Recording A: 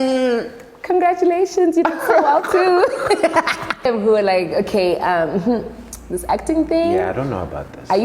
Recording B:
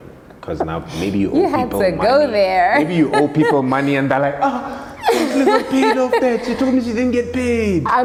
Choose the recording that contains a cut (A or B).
A